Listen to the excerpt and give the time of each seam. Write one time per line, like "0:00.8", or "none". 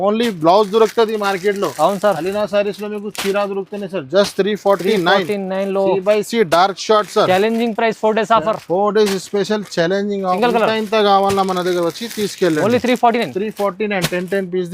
0:10.4